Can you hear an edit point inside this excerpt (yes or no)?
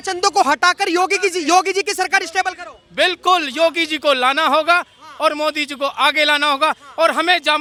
no